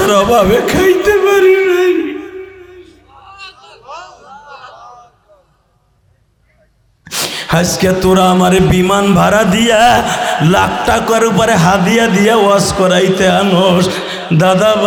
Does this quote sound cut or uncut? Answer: uncut